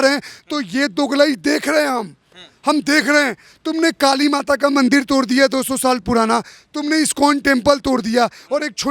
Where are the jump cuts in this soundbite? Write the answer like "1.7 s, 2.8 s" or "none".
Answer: none